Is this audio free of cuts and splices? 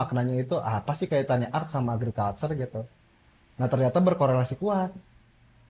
yes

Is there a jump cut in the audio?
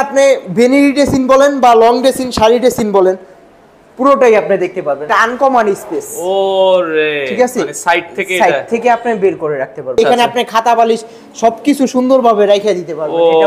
yes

